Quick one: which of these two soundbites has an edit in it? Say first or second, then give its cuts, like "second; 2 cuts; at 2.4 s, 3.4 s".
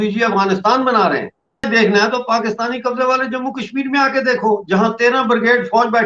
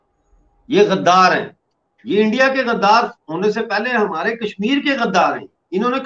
first; 1 cut; at 1.7 s